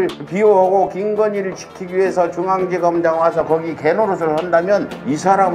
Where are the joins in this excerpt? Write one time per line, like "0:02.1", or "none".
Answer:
none